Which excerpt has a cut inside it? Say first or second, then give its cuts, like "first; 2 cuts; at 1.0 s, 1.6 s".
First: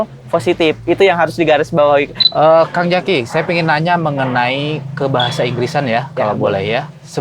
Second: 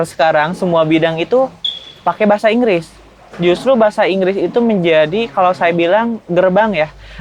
first; 1 cut; at 2.2 s